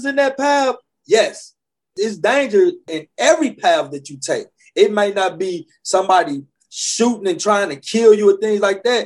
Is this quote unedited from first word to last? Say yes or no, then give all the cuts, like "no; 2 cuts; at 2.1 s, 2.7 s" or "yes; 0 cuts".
no; 2 cuts; at 1.9 s, 2.9 s